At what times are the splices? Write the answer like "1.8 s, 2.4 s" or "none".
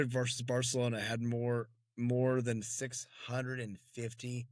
none